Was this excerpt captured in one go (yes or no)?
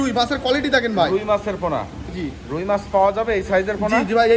yes